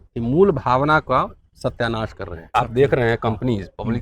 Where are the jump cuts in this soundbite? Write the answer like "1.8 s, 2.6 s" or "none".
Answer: 2.3 s